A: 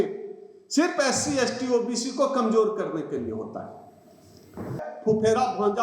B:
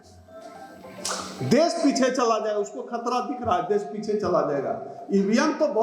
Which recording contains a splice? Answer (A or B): A